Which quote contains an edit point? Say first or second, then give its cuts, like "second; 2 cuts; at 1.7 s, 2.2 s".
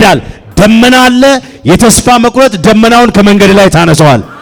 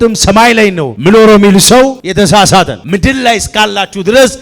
second; 3 cuts; at 0.9 s, 2.0 s, 2.8 s